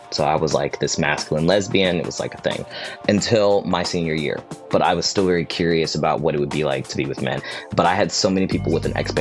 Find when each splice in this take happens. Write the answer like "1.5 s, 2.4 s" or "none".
4.5 s, 7.4 s